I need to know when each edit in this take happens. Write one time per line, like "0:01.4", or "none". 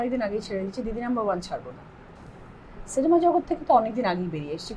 none